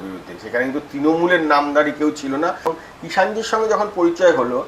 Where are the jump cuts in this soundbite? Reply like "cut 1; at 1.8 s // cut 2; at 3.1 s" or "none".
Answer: cut 1; at 2.8 s